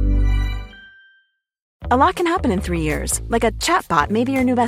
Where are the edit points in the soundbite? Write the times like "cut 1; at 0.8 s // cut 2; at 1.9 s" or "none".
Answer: cut 1; at 1.8 s